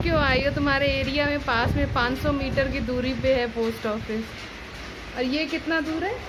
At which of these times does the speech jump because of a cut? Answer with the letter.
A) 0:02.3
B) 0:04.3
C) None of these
C